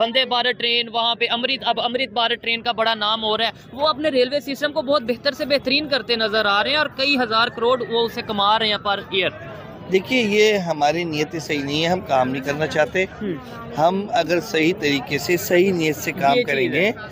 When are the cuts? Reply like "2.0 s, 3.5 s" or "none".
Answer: none